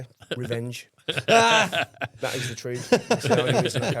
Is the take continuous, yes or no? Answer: yes